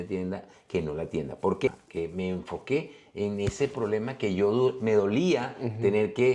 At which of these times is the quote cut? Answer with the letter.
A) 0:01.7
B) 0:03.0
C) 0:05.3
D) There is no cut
A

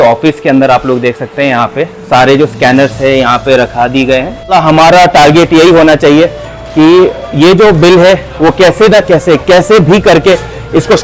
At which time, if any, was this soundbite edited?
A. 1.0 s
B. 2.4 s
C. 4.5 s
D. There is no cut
C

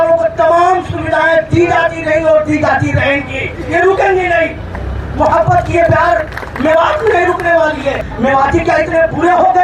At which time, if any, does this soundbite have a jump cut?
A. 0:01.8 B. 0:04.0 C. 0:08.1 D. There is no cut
C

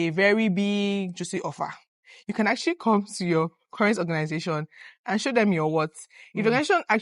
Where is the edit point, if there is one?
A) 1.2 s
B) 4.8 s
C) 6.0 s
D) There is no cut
D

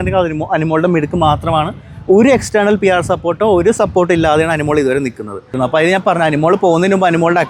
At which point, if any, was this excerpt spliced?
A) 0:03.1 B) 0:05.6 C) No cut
B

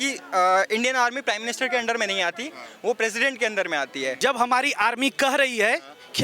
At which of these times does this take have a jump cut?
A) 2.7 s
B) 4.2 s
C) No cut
B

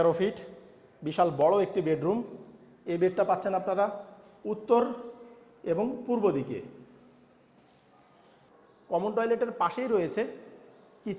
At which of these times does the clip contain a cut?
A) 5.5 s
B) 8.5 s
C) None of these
B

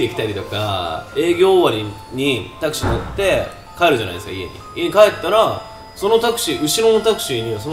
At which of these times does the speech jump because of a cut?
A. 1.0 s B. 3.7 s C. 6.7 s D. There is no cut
D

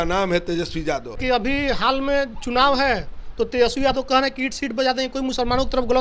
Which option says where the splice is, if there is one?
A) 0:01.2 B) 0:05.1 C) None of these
A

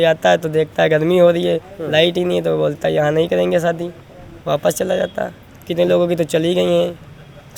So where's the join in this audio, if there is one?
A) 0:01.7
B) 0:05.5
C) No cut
B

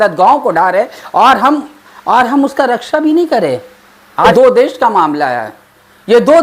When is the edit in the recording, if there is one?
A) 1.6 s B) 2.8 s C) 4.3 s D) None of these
C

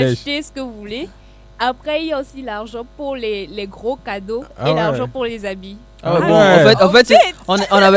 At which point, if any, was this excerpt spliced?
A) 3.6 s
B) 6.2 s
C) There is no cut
C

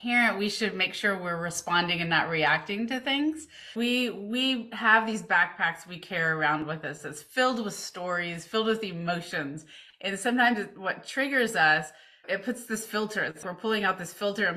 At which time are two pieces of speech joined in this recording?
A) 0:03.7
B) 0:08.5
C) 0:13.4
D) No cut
A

